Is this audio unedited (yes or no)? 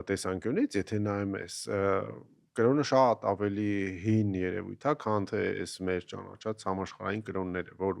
yes